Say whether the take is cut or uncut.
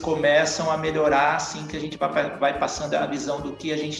uncut